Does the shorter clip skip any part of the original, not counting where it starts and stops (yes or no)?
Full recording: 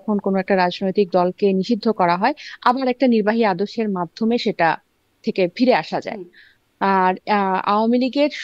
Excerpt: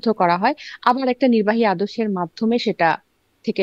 no